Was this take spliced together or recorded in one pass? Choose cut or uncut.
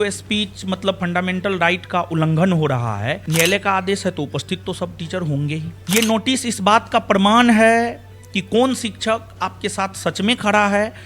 cut